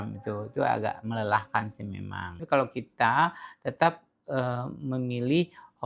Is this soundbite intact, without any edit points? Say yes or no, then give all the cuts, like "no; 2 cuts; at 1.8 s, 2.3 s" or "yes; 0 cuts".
no; 1 cut; at 2.4 s